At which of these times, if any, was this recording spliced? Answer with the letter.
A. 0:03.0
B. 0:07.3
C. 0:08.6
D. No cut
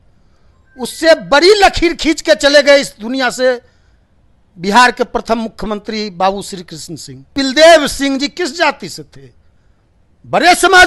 B